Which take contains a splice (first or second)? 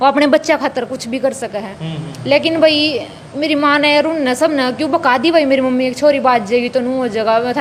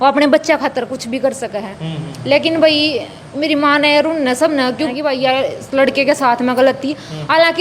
second